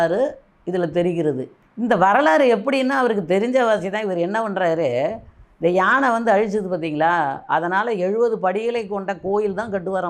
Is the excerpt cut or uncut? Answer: uncut